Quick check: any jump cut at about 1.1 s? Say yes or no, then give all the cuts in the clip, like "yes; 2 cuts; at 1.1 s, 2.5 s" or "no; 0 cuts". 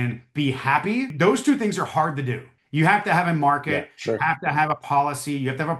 yes; 1 cut; at 1.1 s